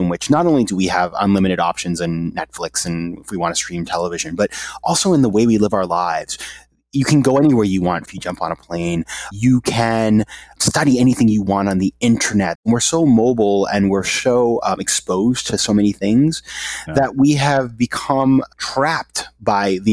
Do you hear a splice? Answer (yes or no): yes